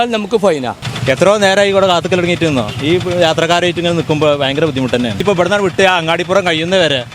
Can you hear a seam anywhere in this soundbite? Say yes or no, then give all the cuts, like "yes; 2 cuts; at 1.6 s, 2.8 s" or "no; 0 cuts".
yes; 2 cuts; at 0.9 s, 5.2 s